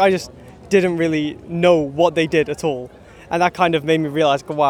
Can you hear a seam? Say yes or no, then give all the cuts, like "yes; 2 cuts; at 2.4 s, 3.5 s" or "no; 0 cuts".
no; 0 cuts